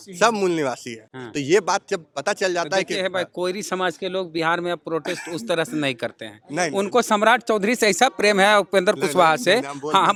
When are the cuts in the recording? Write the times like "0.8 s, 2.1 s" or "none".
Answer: none